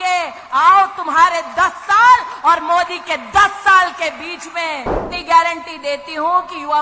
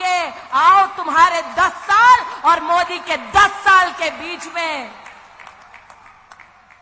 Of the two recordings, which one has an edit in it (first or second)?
first